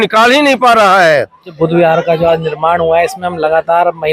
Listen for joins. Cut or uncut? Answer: cut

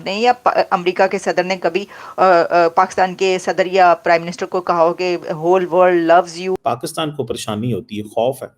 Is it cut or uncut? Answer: cut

